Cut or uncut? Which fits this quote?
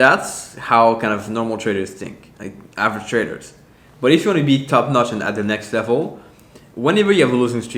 uncut